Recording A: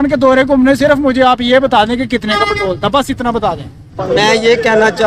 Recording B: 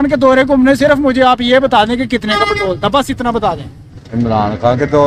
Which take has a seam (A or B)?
A